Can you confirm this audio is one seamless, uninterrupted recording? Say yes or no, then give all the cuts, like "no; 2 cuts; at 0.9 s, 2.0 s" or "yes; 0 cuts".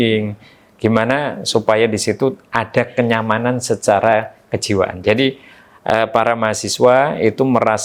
yes; 0 cuts